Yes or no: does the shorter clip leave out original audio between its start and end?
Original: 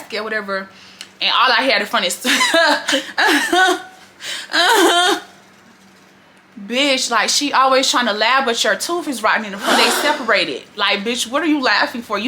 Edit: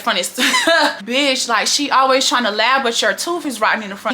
yes